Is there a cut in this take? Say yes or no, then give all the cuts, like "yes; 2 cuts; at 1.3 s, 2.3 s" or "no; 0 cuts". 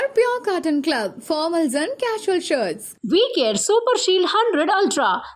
no; 0 cuts